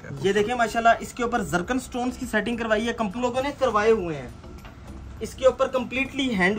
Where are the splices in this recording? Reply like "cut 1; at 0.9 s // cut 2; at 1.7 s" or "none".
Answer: cut 1; at 3.2 s